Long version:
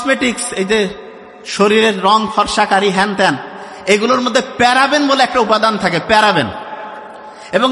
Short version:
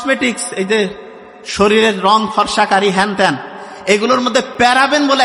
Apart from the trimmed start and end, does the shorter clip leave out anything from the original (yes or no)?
no